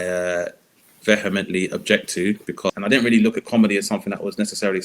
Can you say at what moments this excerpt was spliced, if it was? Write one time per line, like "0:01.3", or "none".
0:02.7